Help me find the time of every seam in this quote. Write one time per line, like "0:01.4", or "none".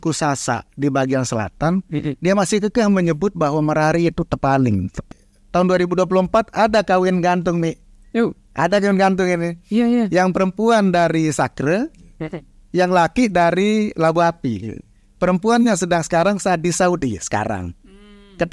0:05.1

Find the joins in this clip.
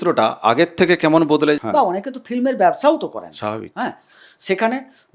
0:01.6

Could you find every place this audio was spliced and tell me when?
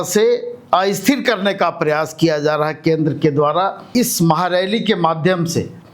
0:03.8

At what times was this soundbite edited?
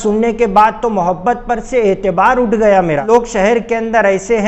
0:03.1

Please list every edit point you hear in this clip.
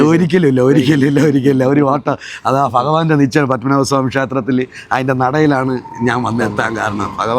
none

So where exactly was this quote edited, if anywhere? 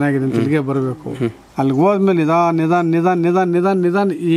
0:01.4

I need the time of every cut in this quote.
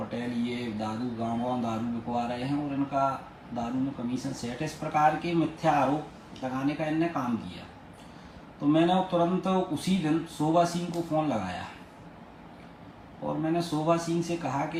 none

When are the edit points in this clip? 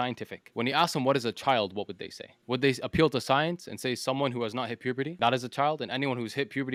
none

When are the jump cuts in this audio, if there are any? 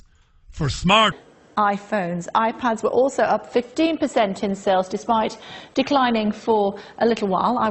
none

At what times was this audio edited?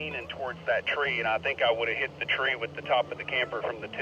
none

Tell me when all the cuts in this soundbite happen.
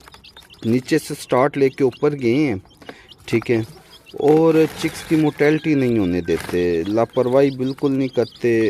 none

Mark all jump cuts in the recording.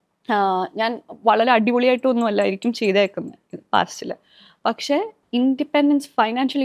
0:05.2

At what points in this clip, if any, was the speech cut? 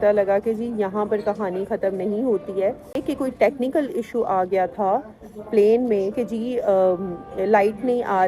0:03.0

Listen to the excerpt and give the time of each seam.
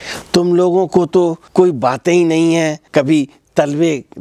0:01.4
0:02.8

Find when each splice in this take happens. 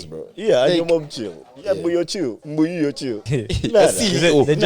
0:02.4
0:03.2

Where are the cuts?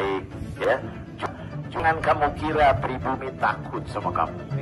0:01.3

